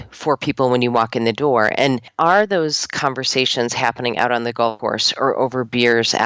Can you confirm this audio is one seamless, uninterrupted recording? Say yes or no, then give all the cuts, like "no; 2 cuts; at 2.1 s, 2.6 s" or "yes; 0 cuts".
no; 2 cuts; at 2.1 s, 4.8 s